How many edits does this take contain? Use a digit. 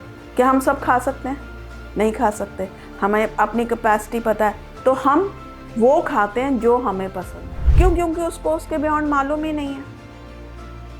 1